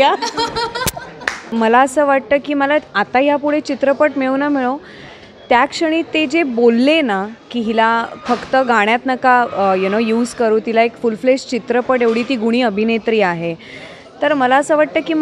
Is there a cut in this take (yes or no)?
yes